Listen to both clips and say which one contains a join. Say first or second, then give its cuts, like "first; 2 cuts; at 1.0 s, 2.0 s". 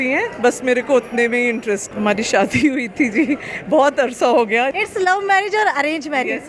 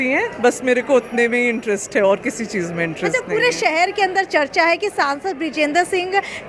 first; 2 cuts; at 1.8 s, 4.8 s